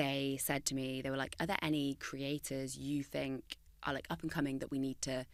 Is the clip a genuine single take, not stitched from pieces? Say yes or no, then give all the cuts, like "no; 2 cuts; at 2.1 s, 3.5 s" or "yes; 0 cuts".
yes; 0 cuts